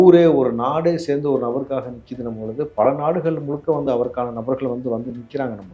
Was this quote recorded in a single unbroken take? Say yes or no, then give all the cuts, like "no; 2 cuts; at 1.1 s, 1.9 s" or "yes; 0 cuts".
yes; 0 cuts